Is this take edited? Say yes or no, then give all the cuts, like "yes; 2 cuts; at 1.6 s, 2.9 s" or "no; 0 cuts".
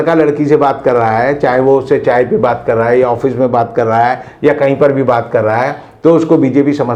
no; 0 cuts